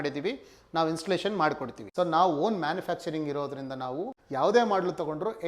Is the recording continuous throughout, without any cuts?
no; 1 cut; at 1.8 s

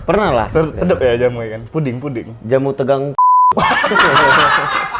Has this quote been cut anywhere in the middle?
no; 0 cuts

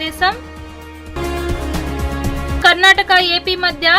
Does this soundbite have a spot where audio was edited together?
no; 0 cuts

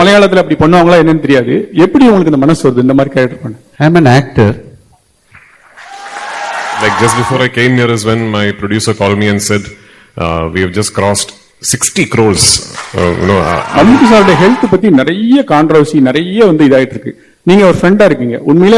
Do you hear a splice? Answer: yes; 2 cuts; at 6.9 s, 13.6 s

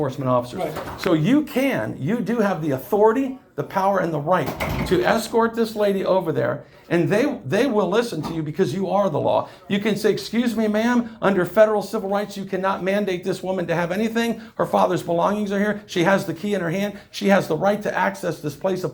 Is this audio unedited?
yes; 0 cuts

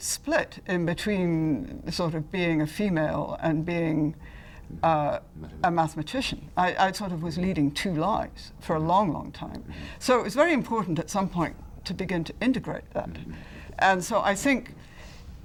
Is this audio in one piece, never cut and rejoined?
yes; 0 cuts

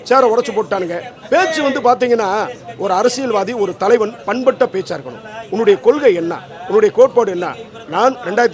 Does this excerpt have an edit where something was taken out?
no; 0 cuts

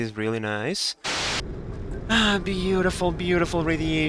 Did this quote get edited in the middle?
yes; 1 cut; at 1.1 s

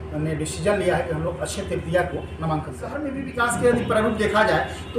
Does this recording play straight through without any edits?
no; 1 cut; at 3.1 s

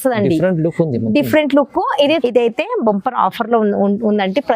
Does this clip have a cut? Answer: yes; 1 cut; at 2.2 s

